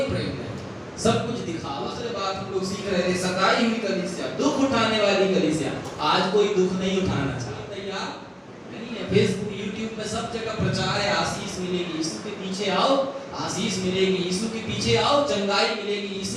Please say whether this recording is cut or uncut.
cut